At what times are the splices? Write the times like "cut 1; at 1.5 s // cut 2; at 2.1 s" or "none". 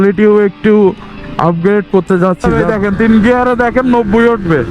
cut 1; at 2.6 s